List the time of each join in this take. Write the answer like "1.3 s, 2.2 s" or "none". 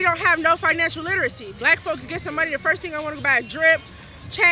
none